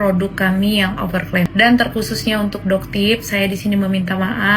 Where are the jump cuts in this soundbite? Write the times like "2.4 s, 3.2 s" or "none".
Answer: 1.5 s

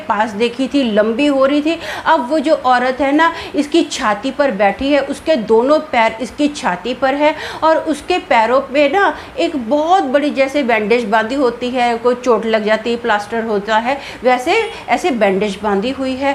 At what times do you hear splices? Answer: none

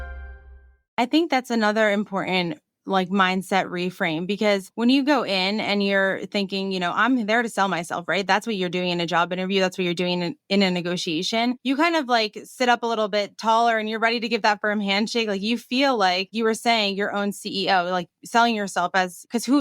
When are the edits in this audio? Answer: 0.9 s

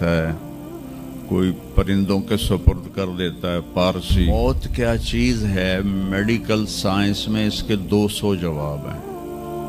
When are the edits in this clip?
4.3 s

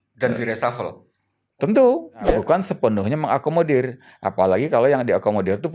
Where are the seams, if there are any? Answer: 2.3 s

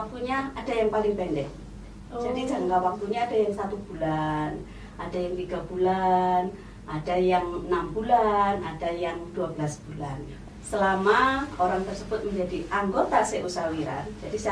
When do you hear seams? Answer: 10.3 s

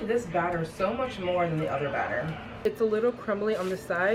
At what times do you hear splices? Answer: 2.6 s

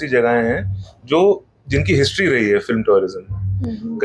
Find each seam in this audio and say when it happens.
none

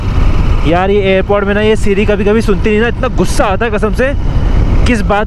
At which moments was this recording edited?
none

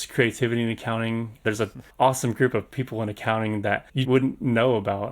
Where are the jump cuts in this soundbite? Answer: 1.5 s, 4.0 s

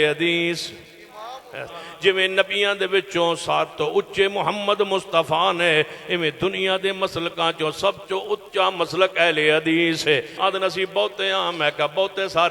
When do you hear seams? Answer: 1.8 s, 10.3 s

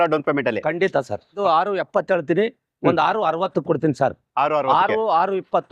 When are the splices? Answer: 1.3 s

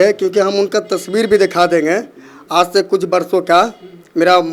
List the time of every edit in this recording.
none

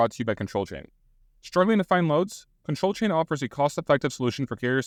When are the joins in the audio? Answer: none

